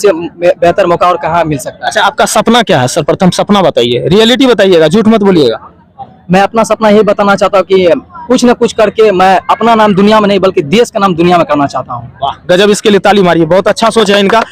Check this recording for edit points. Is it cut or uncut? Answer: uncut